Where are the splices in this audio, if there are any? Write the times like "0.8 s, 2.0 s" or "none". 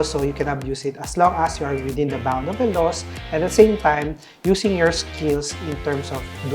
none